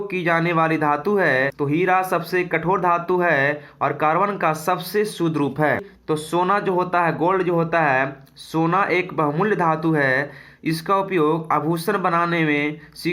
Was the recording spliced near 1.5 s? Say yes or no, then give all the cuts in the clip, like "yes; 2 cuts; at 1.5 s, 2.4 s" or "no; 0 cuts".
yes; 2 cuts; at 1.5 s, 5.9 s